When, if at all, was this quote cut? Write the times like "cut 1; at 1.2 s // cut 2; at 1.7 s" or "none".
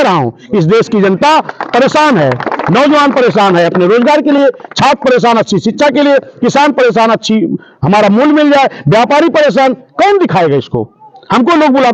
none